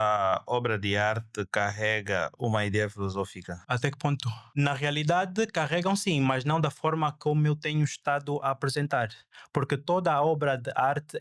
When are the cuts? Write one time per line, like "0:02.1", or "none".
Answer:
0:03.5
0:04.4